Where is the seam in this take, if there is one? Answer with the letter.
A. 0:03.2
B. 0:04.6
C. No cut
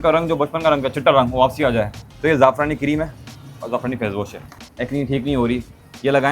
B